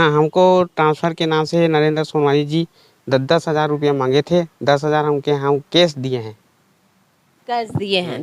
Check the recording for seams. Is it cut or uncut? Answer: uncut